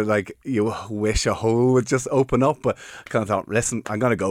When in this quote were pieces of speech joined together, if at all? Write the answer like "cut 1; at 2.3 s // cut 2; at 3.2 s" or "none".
none